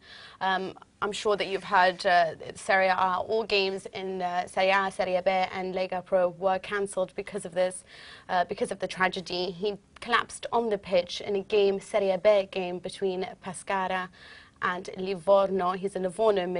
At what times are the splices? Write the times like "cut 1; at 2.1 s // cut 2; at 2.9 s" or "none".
none